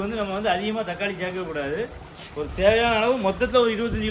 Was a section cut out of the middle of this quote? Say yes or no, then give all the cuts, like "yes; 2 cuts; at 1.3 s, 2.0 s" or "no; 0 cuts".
no; 0 cuts